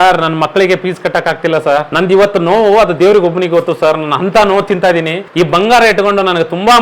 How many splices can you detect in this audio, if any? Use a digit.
2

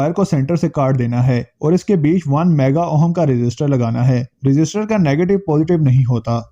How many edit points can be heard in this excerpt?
0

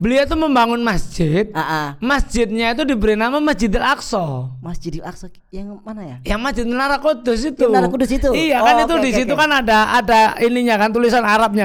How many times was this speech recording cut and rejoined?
0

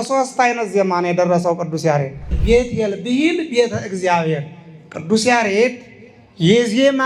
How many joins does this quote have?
1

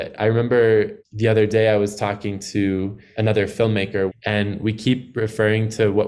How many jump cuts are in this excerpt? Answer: 3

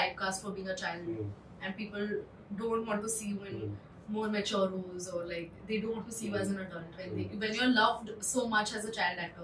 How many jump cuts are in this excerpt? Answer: 0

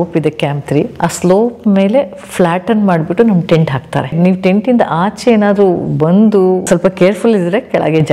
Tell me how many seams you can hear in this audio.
3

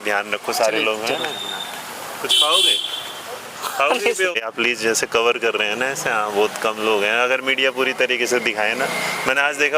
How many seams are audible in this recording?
1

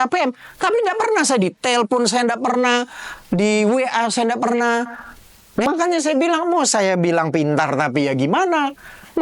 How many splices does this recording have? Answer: 1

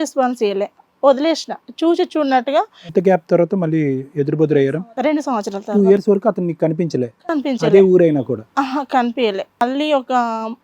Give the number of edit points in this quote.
2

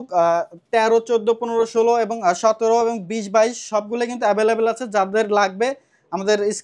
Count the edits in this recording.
0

